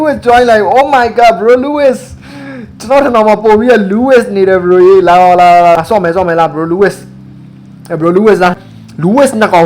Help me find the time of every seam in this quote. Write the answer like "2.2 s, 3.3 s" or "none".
5.8 s, 8.6 s